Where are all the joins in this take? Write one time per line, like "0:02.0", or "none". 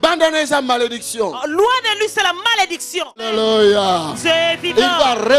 0:03.3

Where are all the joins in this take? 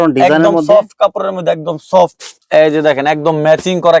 0:02.2

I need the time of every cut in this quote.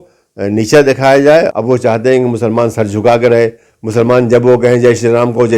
0:01.5

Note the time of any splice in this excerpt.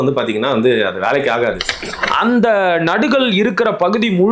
0:01.7

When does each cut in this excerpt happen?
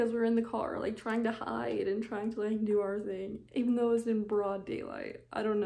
none

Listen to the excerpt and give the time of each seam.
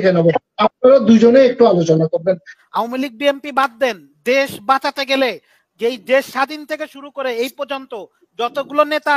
0:02.5

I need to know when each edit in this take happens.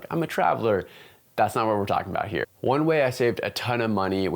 0:02.5

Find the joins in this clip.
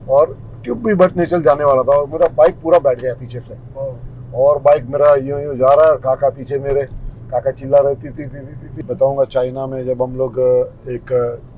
0:08.8

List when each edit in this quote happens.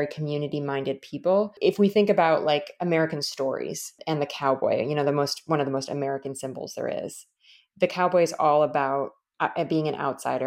0:01.5
0:04.0

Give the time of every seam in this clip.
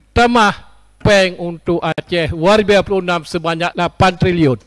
0:03.7

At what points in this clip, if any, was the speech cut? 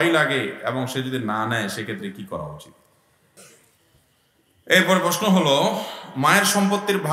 0:03.4

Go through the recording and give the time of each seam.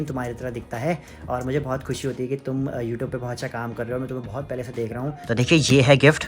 0:05.2

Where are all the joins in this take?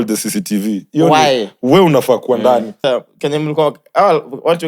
0:02.7

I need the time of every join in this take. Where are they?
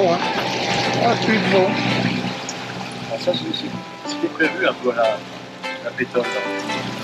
none

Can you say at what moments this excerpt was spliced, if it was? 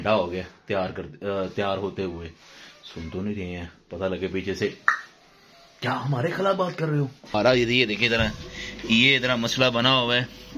0:05.5
0:07.3

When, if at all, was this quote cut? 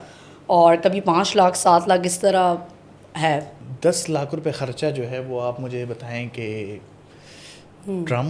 none

